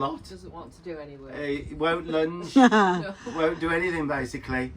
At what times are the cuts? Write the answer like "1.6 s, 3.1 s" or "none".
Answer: none